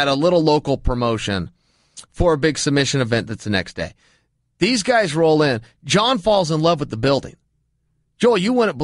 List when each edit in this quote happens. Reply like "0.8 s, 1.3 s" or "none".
none